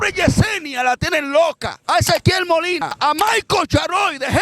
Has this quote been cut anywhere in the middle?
yes; 2 cuts; at 1.7 s, 3.0 s

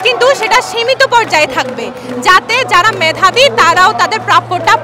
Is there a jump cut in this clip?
no; 0 cuts

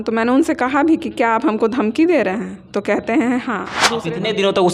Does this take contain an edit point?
yes; 1 cut; at 3.8 s

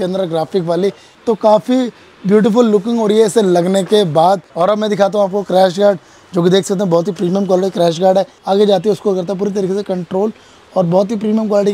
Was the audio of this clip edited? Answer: yes; 3 cuts; at 1.1 s, 4.5 s, 8.4 s

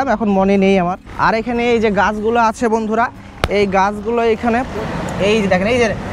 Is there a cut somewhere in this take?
yes; 2 cuts; at 1.0 s, 4.7 s

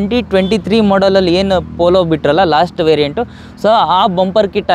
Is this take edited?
no; 0 cuts

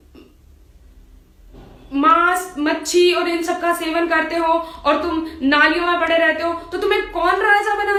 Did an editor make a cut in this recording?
no; 0 cuts

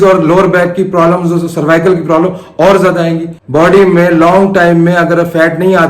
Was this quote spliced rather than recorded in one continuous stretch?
yes; 1 cut; at 3.3 s

